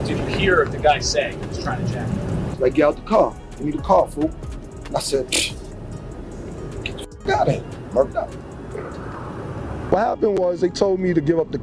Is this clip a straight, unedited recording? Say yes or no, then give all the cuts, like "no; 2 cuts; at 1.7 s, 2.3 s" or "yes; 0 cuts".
yes; 0 cuts